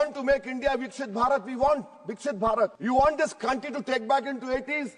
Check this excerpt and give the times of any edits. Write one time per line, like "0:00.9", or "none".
0:02.8